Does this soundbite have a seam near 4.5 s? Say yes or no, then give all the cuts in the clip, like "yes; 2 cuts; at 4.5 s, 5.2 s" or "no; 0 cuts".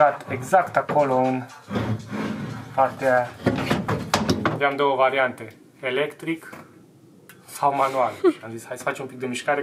yes; 1 cut; at 4.5 s